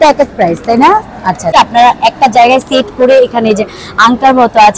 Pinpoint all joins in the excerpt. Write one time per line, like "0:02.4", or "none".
0:01.5